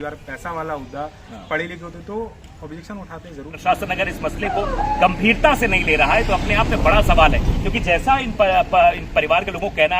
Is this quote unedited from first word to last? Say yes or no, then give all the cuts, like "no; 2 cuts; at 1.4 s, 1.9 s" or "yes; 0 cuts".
no; 1 cut; at 3.5 s